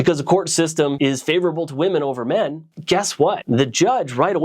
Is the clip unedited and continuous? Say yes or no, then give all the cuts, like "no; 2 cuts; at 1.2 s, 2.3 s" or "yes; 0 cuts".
no; 1 cut; at 0.9 s